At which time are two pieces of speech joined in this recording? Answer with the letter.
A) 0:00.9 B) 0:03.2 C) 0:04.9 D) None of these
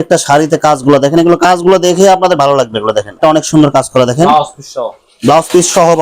B